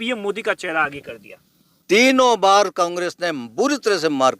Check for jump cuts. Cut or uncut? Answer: cut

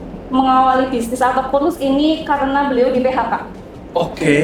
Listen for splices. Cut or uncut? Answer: uncut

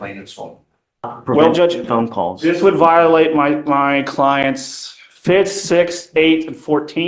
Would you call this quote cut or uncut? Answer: cut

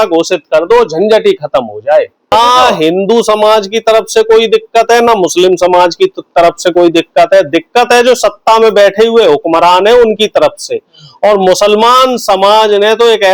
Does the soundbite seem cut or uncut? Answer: cut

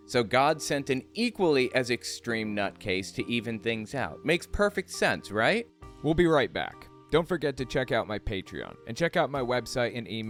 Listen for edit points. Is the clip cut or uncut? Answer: uncut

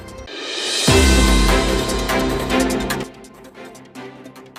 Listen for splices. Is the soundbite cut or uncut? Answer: uncut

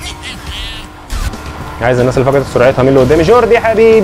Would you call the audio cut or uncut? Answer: cut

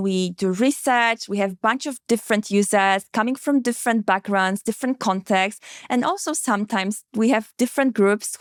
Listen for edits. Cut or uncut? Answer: uncut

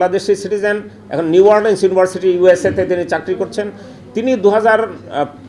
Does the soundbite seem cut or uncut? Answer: uncut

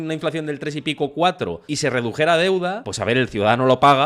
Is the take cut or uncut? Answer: cut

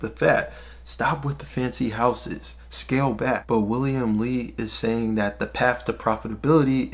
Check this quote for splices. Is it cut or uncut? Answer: uncut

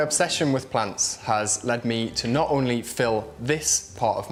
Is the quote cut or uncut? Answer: uncut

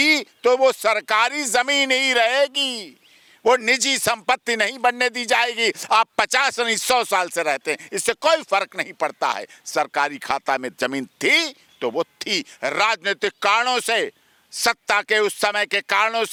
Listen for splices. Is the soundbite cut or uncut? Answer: uncut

